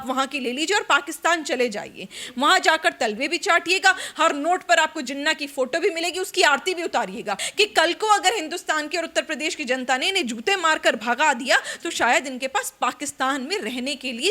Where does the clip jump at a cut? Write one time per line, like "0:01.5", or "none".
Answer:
0:07.4